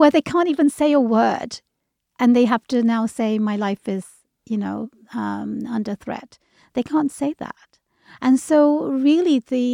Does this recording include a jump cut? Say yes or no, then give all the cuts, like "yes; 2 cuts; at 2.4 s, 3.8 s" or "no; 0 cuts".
no; 0 cuts